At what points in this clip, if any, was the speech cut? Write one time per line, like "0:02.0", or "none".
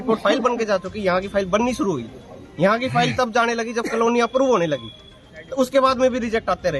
none